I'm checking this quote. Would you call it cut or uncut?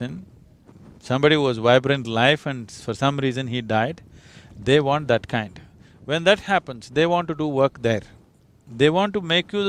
uncut